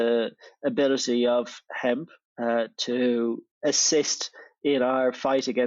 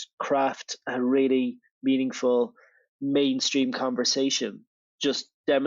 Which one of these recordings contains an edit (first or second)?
first